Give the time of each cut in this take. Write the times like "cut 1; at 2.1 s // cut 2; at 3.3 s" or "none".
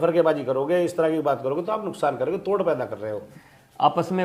cut 1; at 3.2 s